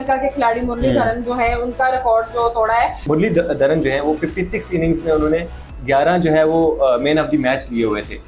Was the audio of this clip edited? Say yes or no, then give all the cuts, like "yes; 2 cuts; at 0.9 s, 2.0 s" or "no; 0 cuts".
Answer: yes; 1 cut; at 3.0 s